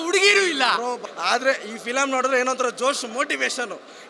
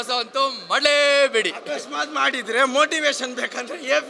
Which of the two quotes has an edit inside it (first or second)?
first